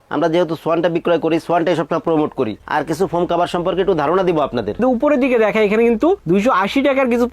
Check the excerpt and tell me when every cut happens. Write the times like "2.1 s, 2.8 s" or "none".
2.6 s, 4.8 s